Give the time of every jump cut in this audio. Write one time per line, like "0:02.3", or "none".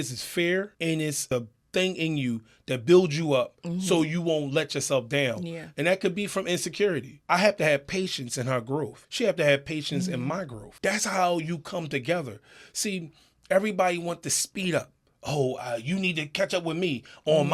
0:01.1
0:07.1
0:09.0
0:10.6